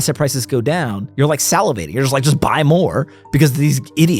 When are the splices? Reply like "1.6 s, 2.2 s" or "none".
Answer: 1.0 s